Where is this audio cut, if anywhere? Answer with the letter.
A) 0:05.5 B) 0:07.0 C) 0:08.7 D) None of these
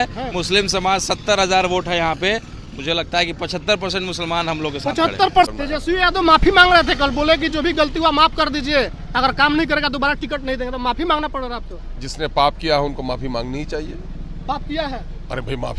A